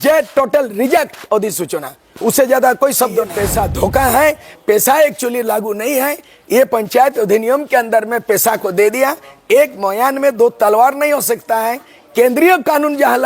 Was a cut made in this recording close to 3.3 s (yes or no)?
yes